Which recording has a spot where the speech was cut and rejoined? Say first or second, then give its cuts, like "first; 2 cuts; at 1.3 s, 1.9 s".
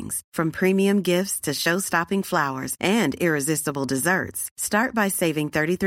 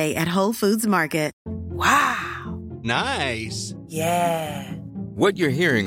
second; 1 cut; at 1.4 s